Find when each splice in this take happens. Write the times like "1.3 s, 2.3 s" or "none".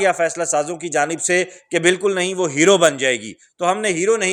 none